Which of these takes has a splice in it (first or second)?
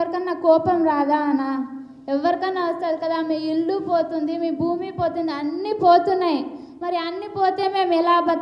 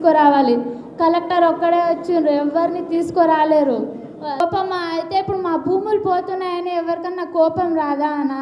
second